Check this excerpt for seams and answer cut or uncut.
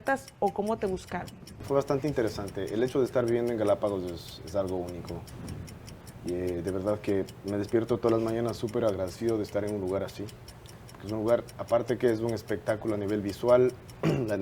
cut